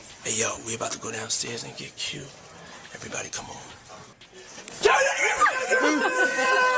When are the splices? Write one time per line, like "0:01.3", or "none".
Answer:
0:04.1

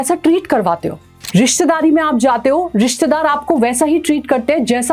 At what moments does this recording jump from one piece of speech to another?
none

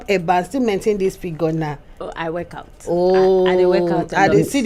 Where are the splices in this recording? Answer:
none

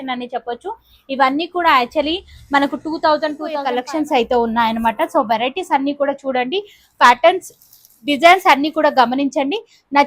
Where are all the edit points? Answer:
0:03.7

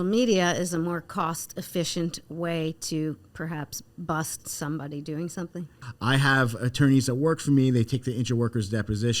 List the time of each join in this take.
0:05.8

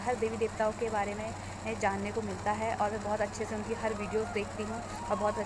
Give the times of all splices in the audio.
none

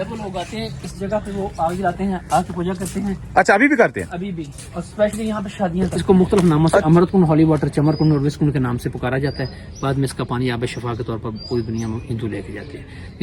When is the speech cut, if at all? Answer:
0:05.9

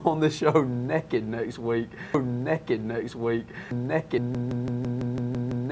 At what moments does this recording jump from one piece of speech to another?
0:02.0

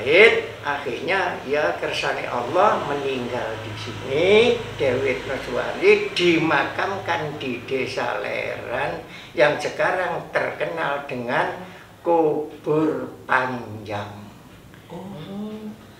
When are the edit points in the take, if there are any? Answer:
none

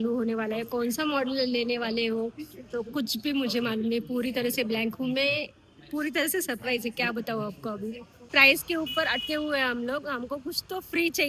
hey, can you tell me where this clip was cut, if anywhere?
0:08.3

